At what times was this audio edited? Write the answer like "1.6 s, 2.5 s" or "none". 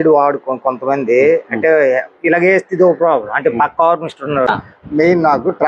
4.5 s